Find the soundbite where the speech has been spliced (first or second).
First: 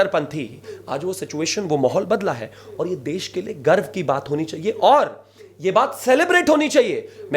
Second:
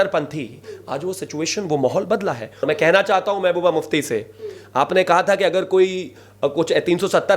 second